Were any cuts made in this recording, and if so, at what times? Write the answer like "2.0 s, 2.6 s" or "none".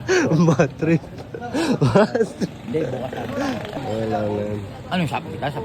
none